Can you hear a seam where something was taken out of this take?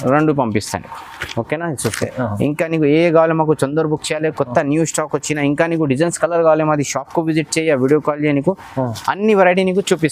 no; 0 cuts

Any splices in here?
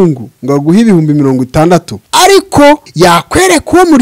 yes; 2 cuts; at 2.0 s, 2.9 s

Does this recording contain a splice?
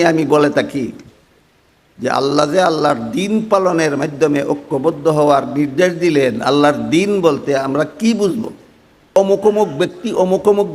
yes; 1 cut; at 9.1 s

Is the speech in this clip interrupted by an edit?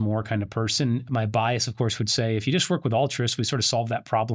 yes; 1 cut; at 1.1 s

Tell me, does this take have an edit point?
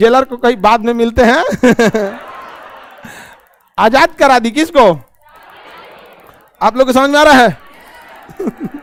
no; 0 cuts

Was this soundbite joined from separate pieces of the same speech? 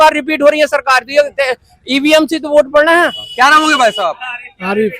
yes; 1 cut; at 3.2 s

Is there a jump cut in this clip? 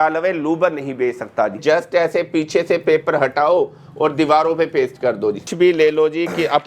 yes; 2 cuts; at 1.6 s, 5.5 s

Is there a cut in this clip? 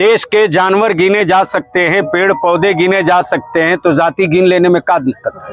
no; 0 cuts

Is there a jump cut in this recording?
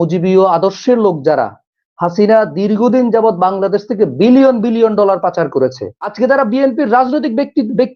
yes; 1 cut; at 6.2 s

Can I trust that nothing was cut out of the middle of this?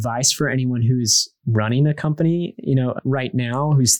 yes; 0 cuts

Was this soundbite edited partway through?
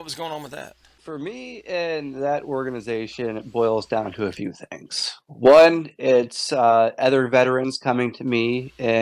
yes; 1 cut; at 1.1 s

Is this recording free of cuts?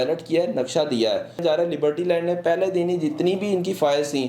no; 1 cut; at 1.4 s

